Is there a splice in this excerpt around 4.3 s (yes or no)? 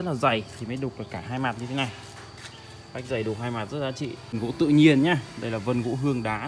yes